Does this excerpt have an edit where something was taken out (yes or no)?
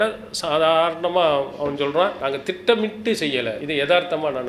yes